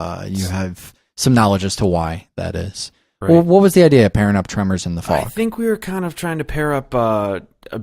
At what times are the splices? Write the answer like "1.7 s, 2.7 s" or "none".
1.1 s